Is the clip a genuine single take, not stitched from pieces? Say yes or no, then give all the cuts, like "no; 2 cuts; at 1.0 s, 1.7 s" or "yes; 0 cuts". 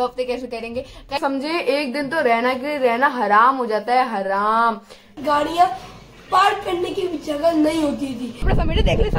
no; 3 cuts; at 1.2 s, 5.1 s, 8.4 s